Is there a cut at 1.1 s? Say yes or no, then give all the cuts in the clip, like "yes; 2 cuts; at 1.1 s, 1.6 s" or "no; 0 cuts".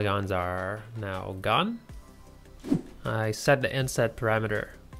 no; 1 cut; at 2.9 s